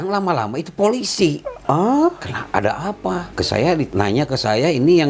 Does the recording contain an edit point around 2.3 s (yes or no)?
yes